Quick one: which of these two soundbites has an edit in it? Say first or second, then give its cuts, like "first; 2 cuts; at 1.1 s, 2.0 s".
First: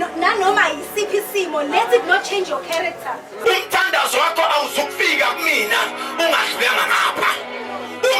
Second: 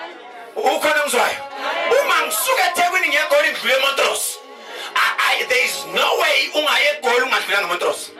first; 1 cut; at 3.3 s